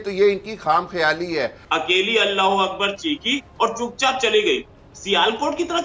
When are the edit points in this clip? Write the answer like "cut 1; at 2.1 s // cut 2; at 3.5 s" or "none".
cut 1; at 1.6 s